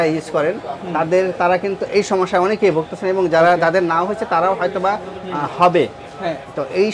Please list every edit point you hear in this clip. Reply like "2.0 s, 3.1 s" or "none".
none